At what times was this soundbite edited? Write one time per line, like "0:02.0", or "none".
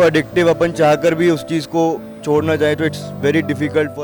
none